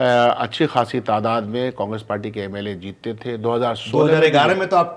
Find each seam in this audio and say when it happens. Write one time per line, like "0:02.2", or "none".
none